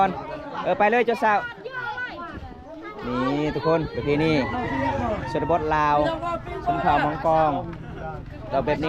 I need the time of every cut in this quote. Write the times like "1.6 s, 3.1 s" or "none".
none